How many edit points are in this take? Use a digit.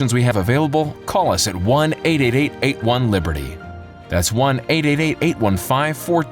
0